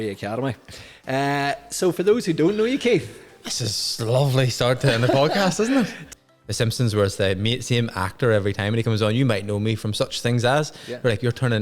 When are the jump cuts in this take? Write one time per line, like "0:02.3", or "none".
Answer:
0:06.0